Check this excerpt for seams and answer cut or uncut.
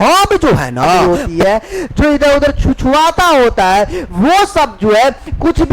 cut